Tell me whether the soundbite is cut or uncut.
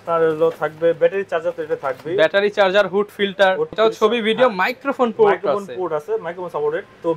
cut